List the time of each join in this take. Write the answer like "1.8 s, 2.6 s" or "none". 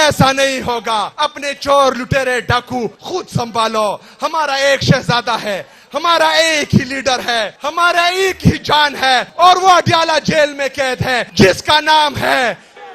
1.1 s, 3.0 s, 7.6 s, 9.3 s, 11.2 s

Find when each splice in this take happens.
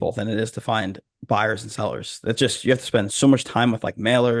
none

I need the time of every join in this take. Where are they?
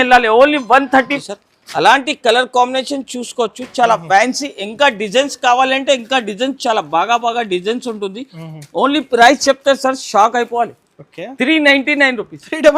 1.2 s

